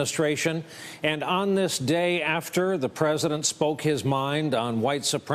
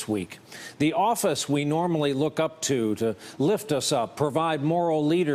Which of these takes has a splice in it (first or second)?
second